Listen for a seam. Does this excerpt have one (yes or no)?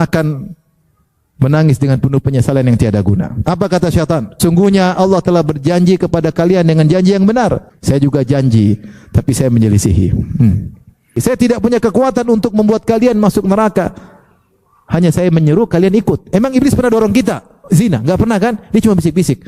yes